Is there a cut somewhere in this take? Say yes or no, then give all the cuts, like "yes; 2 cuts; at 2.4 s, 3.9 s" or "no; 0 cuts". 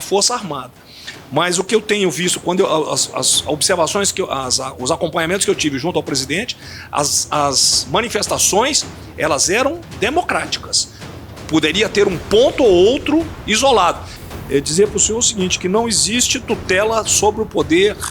yes; 1 cut; at 14.1 s